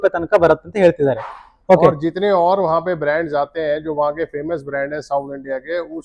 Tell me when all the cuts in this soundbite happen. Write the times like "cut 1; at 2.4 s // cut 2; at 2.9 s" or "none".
none